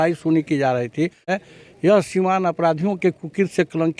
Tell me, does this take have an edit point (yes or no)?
yes